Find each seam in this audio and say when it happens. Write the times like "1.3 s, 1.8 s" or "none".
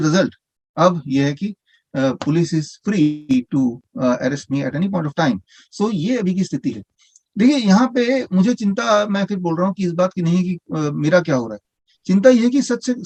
none